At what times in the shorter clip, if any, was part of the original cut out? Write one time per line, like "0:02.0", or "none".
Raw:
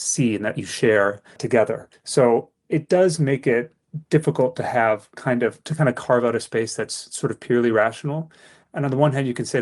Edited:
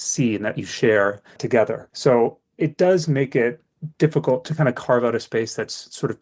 0:01.8
0:04.5